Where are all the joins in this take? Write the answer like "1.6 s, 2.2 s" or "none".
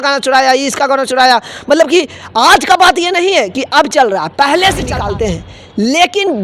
4.9 s